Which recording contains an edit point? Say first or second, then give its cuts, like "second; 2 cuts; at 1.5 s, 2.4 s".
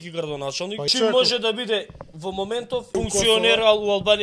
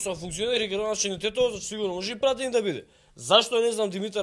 first; 2 cuts; at 0.9 s, 2.9 s